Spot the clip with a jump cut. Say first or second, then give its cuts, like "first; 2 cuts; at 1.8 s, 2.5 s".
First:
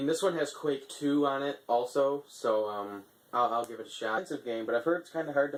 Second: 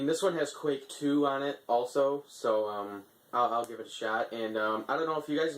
second; 1 cut; at 4.2 s